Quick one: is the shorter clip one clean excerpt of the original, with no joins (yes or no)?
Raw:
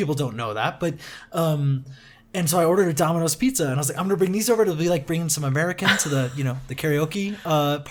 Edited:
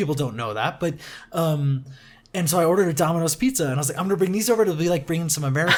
yes